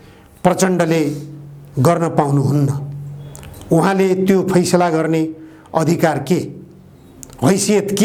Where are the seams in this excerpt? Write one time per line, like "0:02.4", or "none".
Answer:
none